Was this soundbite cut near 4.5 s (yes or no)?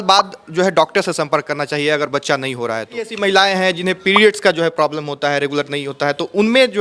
no